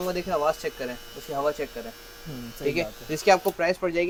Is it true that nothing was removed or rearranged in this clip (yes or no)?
yes